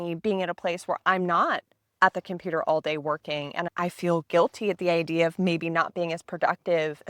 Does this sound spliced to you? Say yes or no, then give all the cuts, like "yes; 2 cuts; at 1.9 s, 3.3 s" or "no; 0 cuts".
no; 0 cuts